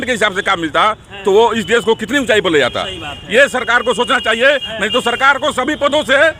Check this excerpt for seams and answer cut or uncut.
uncut